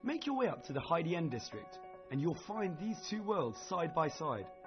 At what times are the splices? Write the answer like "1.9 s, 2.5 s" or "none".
none